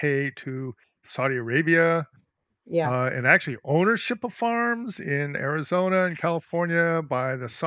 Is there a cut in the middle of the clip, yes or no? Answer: no